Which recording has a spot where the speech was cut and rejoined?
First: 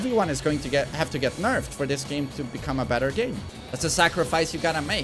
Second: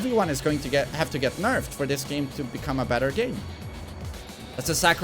first; 1 cut; at 3.5 s

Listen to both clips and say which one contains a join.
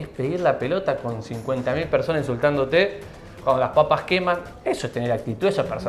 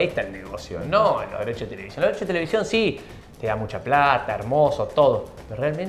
first; 1 cut; at 4.5 s

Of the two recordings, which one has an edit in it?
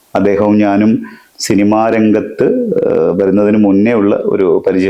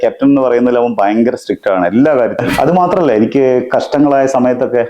second; 1 cut; at 2.5 s

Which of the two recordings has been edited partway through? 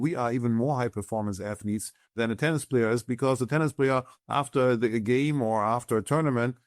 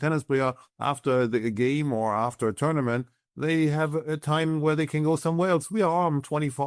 first; 1 cut; at 2.1 s

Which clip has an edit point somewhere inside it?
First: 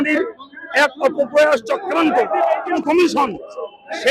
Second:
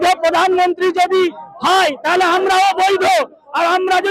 first; 1 cut; at 2.8 s

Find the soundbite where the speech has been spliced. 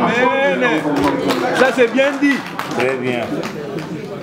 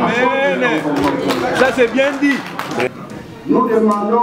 second; 1 cut; at 2.9 s

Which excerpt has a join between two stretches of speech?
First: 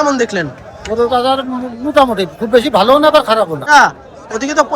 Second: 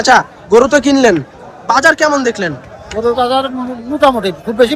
first; 1 cut; at 3.6 s

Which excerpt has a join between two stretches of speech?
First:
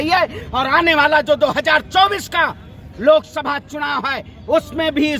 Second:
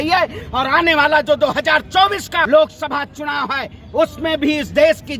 second; 1 cut; at 2.5 s

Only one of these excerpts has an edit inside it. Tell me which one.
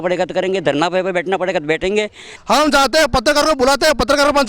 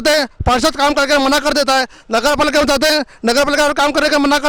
first; 1 cut; at 2.3 s

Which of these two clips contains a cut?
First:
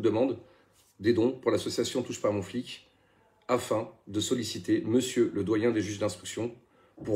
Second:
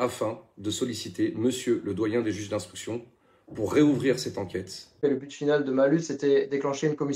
second; 1 cut; at 5.0 s

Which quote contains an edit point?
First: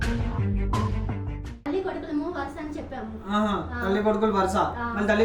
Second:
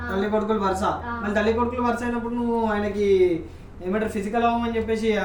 first; 1 cut; at 1.7 s

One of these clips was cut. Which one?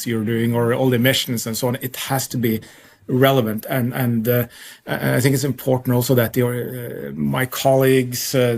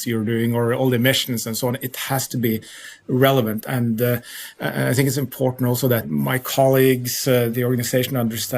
second; 3 cuts; at 3.7 s, 6.0 s, 7.5 s

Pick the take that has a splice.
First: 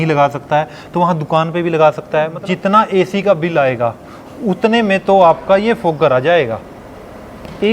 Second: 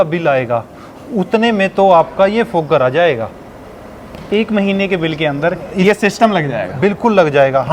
first; 1 cut; at 2.4 s

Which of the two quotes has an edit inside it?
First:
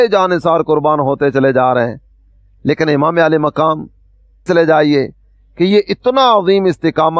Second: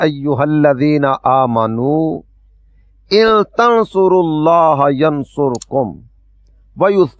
first; 1 cut; at 4.5 s

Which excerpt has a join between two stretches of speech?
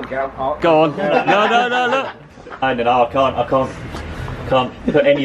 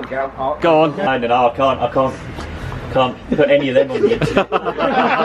second; 1 cut; at 1.0 s

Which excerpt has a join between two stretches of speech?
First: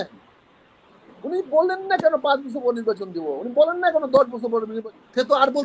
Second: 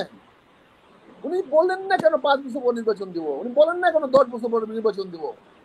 first; 1 cut; at 4.7 s

